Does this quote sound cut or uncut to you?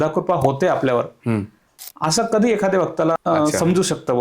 cut